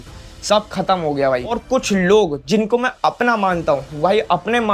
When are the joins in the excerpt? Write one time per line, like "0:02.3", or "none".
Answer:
0:01.6